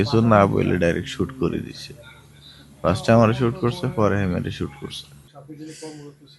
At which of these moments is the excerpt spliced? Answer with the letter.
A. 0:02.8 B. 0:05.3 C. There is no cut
B